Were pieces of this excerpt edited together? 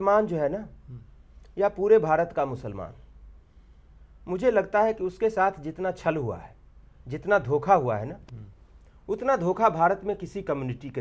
no; 0 cuts

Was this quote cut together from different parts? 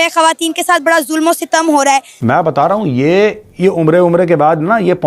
yes; 1 cut; at 2.1 s

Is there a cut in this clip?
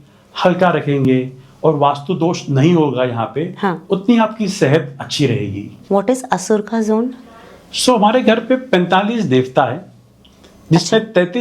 yes; 1 cut; at 5.7 s

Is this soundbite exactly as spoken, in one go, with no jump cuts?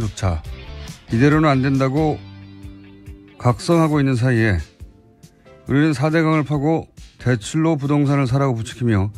no; 1 cut; at 3.1 s

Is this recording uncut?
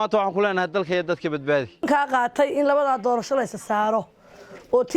no; 1 cut; at 1.6 s

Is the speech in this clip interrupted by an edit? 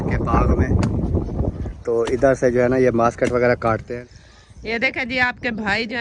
yes; 1 cut; at 3.9 s

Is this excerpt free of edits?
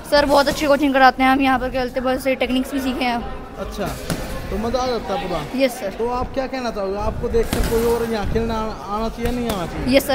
yes; 0 cuts

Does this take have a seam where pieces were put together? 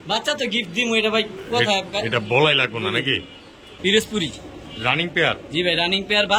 yes; 1 cut; at 3.8 s

